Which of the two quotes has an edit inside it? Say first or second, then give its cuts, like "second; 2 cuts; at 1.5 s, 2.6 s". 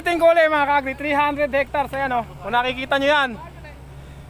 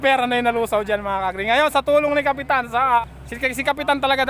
second; 1 cut; at 3.2 s